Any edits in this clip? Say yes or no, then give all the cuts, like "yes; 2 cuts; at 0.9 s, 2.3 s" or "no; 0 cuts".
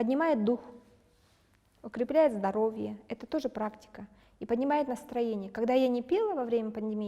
no; 0 cuts